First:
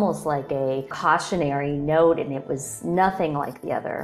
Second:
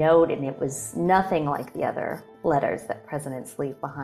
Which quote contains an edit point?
first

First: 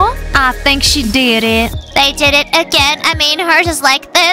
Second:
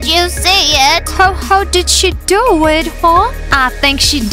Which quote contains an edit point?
second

